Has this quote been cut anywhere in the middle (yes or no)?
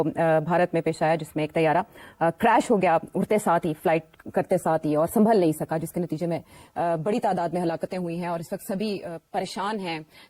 no